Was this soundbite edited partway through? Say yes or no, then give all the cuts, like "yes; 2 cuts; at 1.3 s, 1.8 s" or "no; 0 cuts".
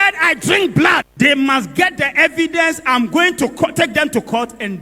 yes; 1 cut; at 1.1 s